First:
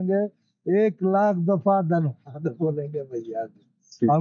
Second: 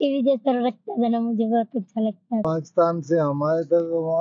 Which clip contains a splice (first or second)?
second